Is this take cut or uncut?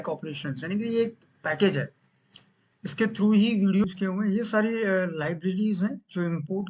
cut